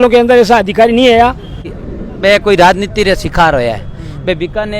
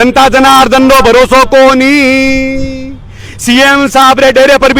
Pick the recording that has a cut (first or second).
first